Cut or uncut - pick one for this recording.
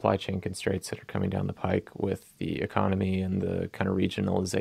uncut